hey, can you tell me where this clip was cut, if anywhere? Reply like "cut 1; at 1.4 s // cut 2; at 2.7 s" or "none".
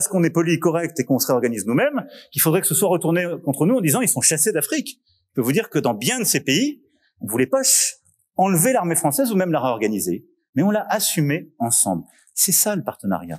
none